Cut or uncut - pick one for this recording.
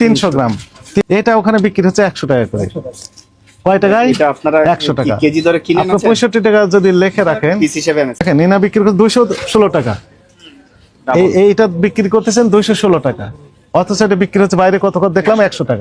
cut